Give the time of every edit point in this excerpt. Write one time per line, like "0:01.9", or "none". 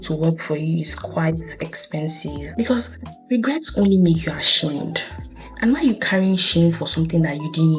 0:02.4